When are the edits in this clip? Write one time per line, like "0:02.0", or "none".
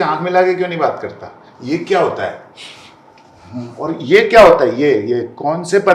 none